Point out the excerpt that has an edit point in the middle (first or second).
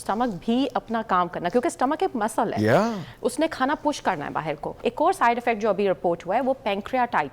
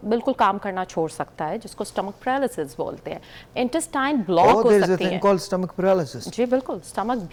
first